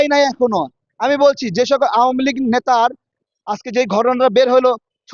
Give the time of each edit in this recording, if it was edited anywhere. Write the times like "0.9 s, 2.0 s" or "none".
3.1 s